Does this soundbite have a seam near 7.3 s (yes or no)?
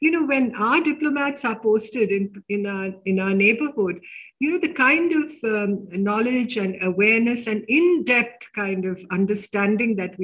no